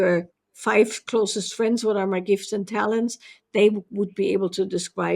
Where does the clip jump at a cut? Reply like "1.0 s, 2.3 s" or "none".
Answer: none